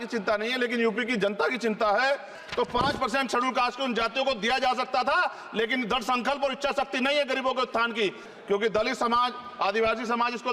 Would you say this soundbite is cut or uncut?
cut